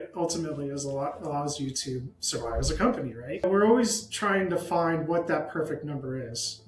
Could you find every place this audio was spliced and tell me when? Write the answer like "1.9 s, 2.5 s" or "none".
3.4 s